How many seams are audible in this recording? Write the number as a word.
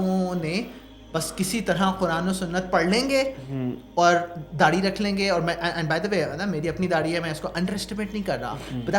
zero